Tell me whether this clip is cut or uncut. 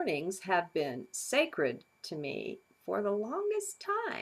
cut